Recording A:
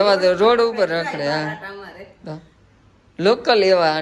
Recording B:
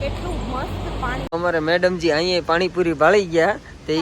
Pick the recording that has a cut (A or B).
B